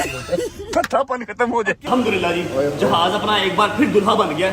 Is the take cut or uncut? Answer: cut